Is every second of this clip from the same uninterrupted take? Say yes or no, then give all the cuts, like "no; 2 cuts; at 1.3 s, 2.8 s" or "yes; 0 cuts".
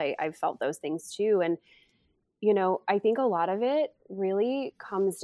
yes; 0 cuts